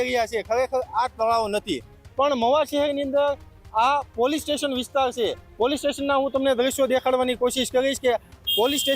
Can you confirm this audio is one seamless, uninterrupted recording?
yes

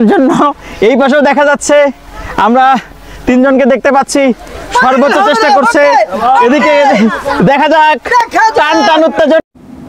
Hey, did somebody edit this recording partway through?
no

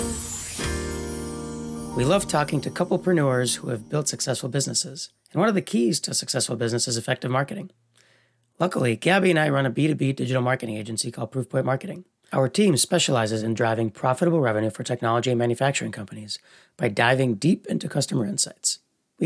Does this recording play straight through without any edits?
no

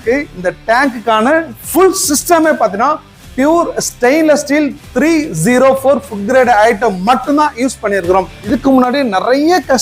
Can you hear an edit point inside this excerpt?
yes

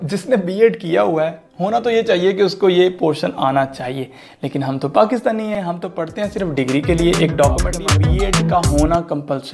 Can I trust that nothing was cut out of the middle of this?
no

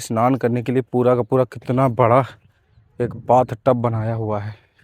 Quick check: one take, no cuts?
yes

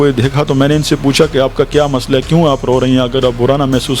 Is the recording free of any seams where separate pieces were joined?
yes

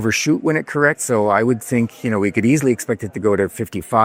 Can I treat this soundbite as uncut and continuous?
yes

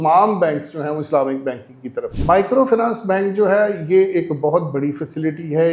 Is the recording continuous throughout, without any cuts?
no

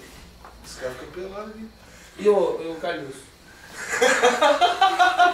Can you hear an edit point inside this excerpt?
yes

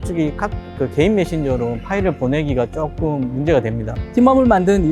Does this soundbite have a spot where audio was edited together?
yes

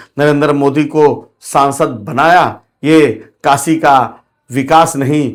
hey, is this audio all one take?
yes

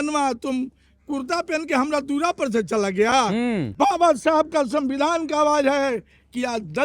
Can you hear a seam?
yes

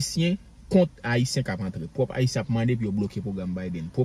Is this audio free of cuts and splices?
yes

